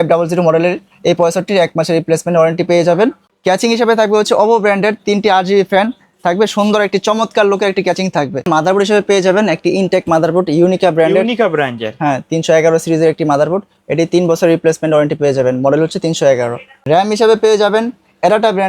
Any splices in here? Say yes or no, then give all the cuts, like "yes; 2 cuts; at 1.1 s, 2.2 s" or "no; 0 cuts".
yes; 3 cuts; at 3.3 s, 8.5 s, 16.9 s